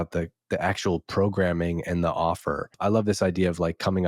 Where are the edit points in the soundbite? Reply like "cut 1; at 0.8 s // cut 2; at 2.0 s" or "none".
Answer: cut 1; at 2.8 s

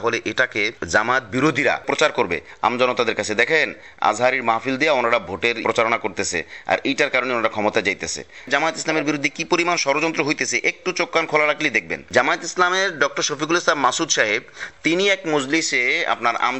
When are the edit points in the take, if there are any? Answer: cut 1; at 1.8 s // cut 2; at 5.6 s // cut 3; at 8.4 s

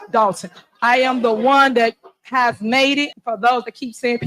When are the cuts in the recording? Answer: cut 1; at 3.1 s

